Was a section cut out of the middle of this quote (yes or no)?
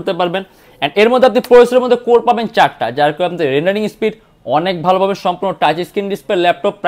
no